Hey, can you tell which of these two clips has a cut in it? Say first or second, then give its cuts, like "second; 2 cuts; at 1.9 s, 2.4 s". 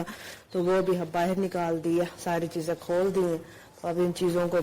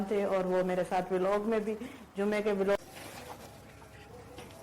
second; 1 cut; at 2.8 s